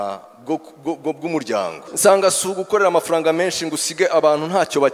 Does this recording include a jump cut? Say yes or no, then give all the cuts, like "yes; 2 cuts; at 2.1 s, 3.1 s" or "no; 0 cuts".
yes; 1 cut; at 1.9 s